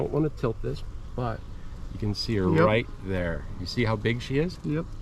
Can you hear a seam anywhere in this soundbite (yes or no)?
yes